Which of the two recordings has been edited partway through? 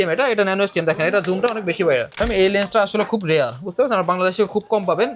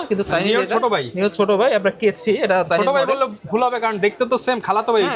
first; 1 cut; at 2.2 s

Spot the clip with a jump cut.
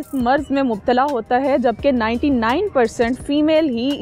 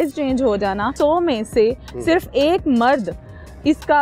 second; 1 cut; at 0.9 s

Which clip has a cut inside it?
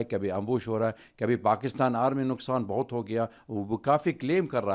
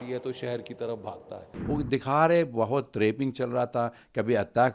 second; 1 cut; at 1.5 s

